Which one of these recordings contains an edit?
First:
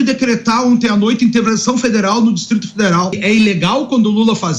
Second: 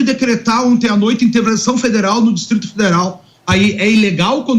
first; 1 cut; at 3.2 s

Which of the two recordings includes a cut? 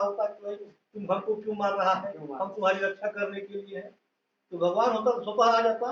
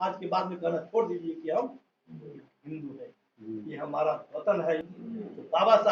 second; 1 cut; at 4.9 s

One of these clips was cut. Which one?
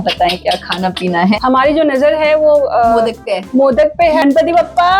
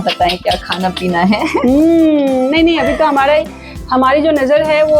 first; 2 cuts; at 1.4 s, 4.2 s

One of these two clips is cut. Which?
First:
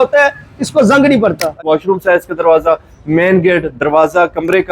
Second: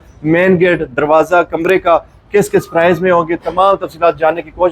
first; 1 cut; at 1.6 s

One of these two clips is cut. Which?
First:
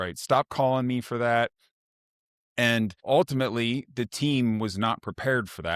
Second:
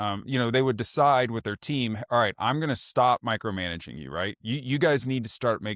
first; 1 cut; at 3.0 s

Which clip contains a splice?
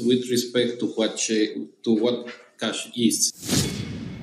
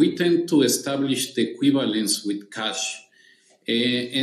first; 1 cut; at 3.3 s

